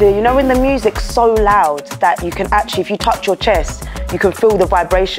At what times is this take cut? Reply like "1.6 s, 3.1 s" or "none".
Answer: none